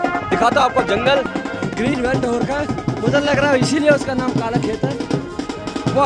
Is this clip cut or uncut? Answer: cut